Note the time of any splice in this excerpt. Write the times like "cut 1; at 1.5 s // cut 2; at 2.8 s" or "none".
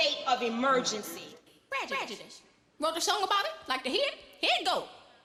none